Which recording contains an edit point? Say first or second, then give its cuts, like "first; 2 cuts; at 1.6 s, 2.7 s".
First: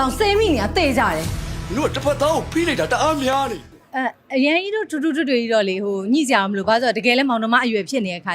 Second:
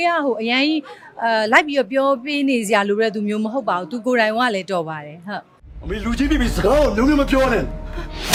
first; 1 cut; at 3.7 s